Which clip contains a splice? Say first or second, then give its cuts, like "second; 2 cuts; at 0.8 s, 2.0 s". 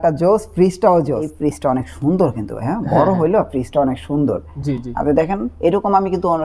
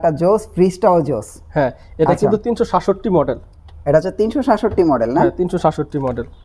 first; 1 cut; at 1.3 s